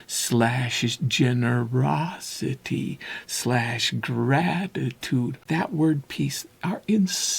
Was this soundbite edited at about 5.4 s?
yes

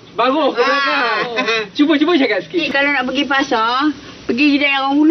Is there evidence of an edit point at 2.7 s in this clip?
yes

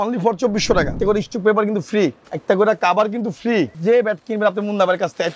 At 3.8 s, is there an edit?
yes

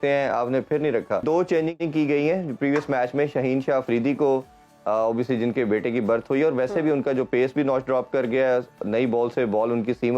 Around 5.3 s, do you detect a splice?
no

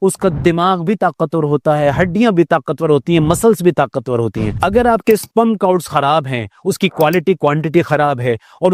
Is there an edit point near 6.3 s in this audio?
no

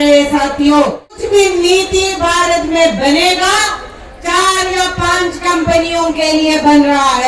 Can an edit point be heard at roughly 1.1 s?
yes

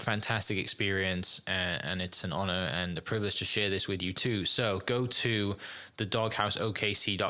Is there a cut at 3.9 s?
no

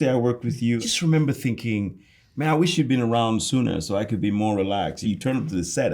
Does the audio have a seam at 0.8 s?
yes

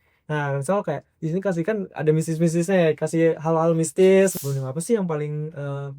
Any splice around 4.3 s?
yes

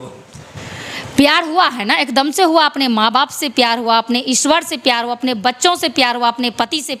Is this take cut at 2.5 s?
no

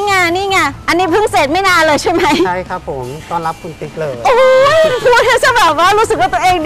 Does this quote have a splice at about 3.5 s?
no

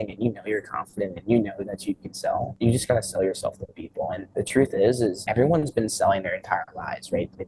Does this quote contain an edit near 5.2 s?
yes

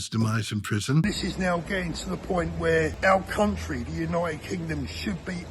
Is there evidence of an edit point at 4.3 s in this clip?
no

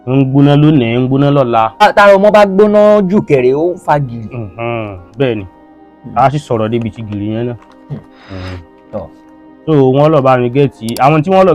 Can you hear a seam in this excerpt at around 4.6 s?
no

